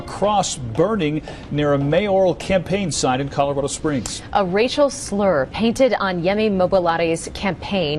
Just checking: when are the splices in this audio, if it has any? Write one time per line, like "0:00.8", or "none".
none